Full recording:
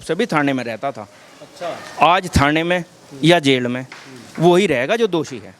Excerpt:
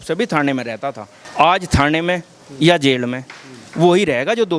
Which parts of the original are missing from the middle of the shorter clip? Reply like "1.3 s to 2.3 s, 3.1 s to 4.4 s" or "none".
1.2 s to 1.8 s